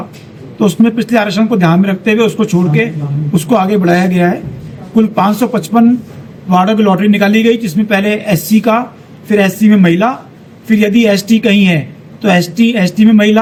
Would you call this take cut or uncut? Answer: uncut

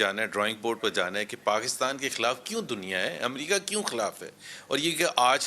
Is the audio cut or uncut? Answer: uncut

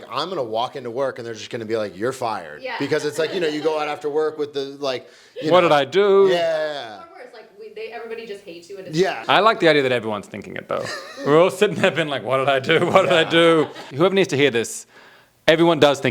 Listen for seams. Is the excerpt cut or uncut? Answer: cut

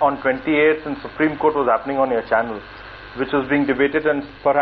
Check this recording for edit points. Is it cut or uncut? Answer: cut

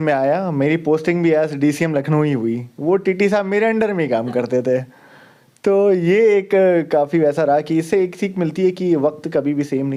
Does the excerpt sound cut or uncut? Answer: uncut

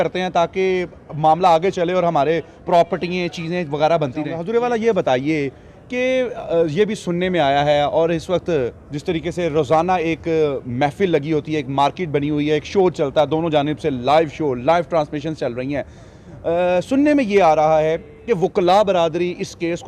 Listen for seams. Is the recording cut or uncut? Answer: cut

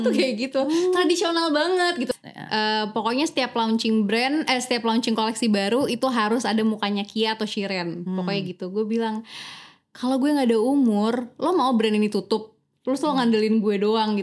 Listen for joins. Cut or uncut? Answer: cut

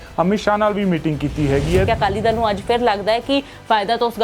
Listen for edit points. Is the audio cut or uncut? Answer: cut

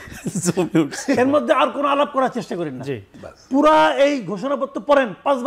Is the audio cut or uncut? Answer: cut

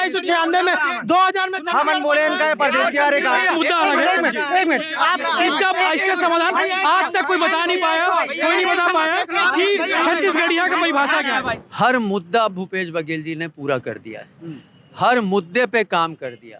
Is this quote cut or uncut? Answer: cut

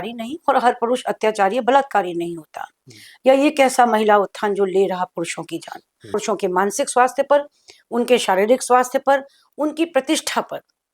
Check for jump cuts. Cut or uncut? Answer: cut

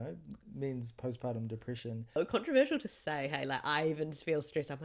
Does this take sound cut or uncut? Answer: cut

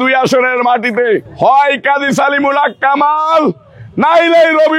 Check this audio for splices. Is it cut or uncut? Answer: cut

